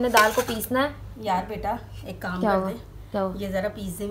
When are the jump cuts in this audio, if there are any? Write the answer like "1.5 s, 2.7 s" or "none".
none